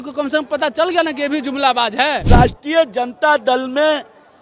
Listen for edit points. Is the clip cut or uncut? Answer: cut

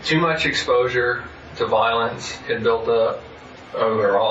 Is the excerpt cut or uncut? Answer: uncut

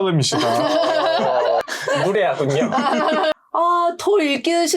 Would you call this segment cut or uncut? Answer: cut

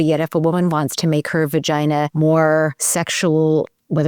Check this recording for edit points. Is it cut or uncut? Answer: cut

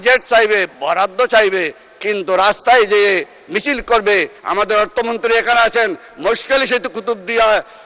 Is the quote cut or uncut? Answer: cut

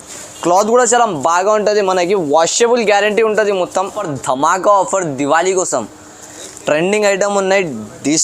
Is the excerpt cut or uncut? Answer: cut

